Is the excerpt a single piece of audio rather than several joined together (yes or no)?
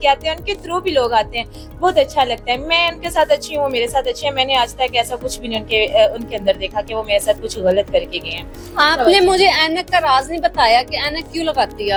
yes